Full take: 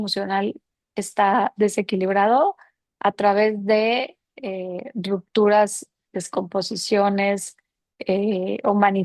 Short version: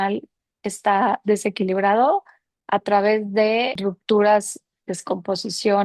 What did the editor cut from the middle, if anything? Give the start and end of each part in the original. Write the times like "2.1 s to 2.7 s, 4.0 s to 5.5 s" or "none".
4.1 s to 5.0 s

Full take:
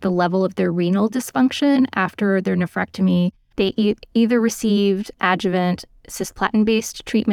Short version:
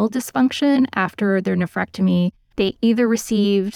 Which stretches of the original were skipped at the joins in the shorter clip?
3.7 s to 4.1 s

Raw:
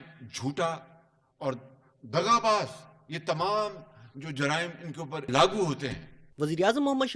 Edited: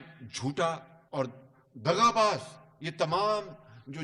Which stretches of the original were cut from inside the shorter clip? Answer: 0.9 s to 1.2 s

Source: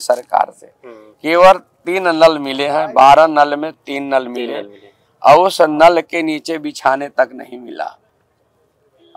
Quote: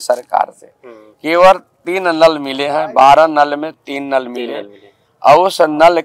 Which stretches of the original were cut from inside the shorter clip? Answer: none

